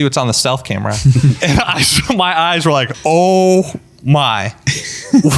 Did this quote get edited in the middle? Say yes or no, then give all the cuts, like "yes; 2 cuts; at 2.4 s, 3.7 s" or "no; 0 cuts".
yes; 2 cuts; at 1.4 s, 2.9 s